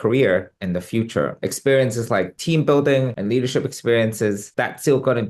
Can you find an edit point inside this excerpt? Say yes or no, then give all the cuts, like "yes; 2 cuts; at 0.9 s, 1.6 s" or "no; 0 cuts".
yes; 2 cuts; at 1.4 s, 4.4 s